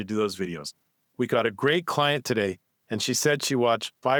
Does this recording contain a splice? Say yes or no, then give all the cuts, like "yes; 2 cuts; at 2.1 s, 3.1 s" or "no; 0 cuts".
no; 0 cuts